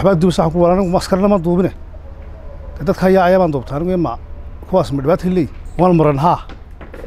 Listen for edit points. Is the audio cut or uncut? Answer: cut